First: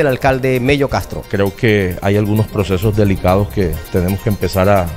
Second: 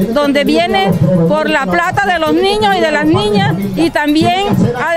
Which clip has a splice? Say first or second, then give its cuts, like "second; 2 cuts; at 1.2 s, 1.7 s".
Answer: first; 1 cut; at 1.2 s